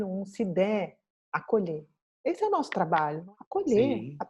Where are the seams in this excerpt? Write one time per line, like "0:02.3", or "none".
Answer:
0:03.2